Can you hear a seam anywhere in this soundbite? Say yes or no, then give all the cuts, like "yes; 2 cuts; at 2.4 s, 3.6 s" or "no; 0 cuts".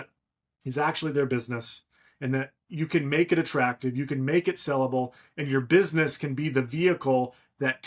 no; 0 cuts